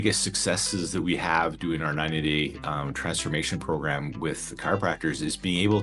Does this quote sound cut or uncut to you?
uncut